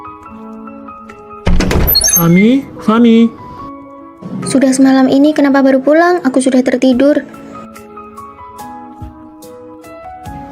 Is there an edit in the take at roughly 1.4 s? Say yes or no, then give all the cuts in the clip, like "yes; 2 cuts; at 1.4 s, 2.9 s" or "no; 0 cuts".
yes; 1 cut; at 1.4 s